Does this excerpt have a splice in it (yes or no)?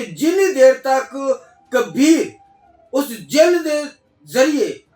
no